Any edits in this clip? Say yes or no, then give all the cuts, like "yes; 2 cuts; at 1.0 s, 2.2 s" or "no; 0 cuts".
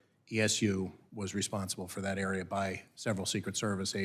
no; 0 cuts